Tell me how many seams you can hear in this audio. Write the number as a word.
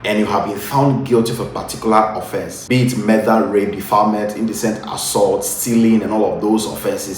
one